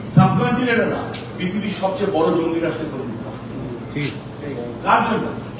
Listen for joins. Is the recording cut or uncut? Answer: uncut